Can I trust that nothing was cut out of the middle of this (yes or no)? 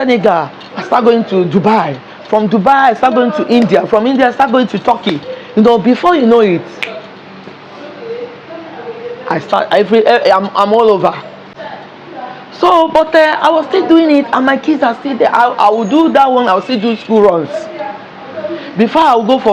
yes